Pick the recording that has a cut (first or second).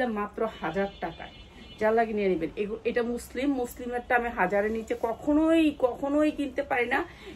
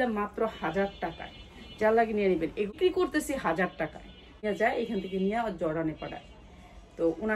second